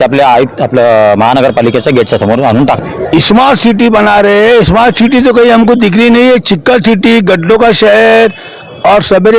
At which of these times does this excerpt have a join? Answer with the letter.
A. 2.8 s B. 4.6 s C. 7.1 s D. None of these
A